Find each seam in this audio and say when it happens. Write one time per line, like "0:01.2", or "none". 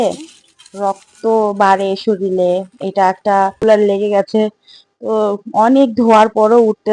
0:03.6

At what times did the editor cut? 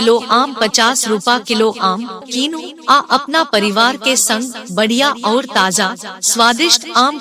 none

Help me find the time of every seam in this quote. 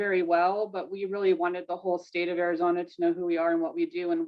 none

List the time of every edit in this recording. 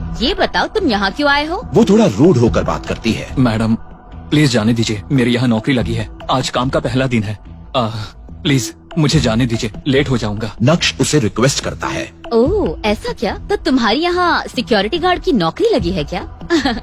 none

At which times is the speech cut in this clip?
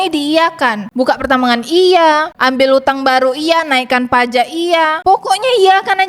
0:05.0

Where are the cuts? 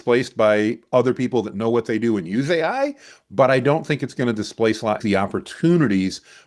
0:05.0

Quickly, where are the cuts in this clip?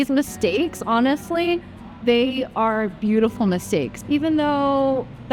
none

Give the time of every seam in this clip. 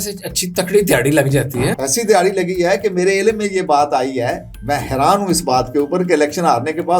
0:01.8

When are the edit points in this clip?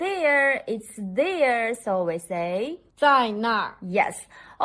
0:02.8

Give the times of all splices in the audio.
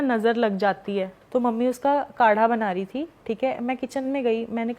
0:01.1

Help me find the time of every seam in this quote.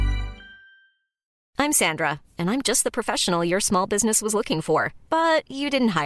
0:01.3

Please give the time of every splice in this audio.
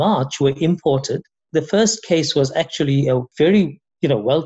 0:01.5
0:03.3

